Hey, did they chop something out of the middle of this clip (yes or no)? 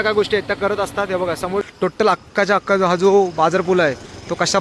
yes